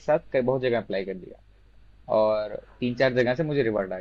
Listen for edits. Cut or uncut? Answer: uncut